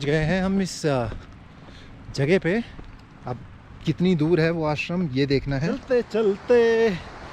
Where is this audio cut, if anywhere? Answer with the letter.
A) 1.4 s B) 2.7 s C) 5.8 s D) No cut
C